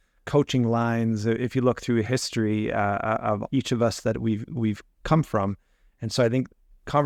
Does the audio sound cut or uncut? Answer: uncut